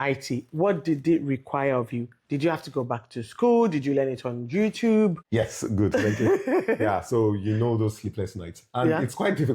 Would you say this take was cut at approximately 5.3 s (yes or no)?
no